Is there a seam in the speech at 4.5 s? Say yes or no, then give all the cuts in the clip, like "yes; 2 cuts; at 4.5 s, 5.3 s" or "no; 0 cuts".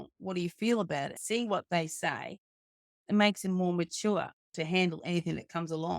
no; 2 cuts; at 1.2 s, 2.9 s